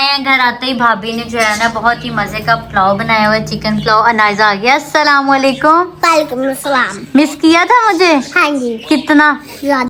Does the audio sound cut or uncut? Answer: uncut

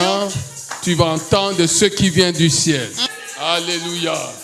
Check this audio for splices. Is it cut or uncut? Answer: cut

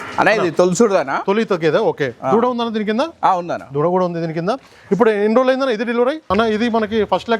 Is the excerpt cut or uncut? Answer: cut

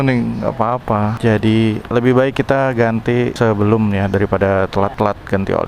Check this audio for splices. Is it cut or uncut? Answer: cut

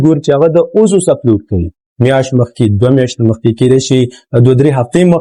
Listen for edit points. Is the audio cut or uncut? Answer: uncut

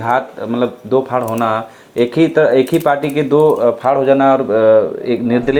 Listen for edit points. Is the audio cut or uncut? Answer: uncut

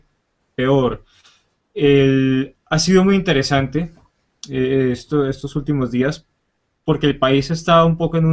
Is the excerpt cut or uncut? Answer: cut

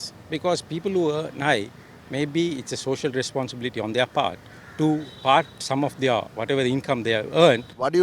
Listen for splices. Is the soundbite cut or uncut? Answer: uncut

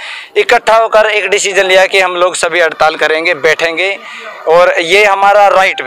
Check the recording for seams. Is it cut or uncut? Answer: uncut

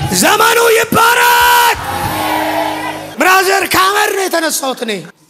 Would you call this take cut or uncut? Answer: uncut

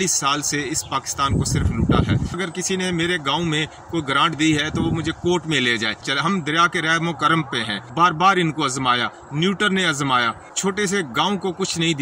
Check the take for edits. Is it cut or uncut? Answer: cut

